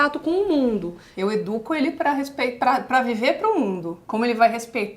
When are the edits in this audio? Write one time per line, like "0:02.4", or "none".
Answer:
0:01.1